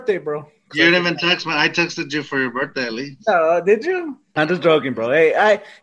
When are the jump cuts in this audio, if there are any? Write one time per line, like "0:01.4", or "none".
0:04.2